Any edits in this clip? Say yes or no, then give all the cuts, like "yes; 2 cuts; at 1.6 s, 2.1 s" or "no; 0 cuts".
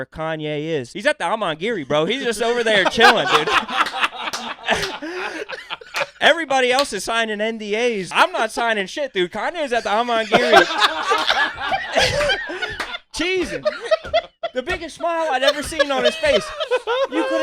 yes; 2 cuts; at 0.9 s, 8.1 s